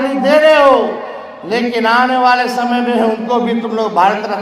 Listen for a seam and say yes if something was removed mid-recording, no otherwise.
no